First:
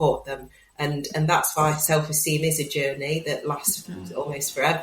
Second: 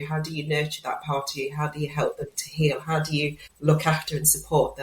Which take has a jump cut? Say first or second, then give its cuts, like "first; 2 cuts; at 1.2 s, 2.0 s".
second; 1 cut; at 3.5 s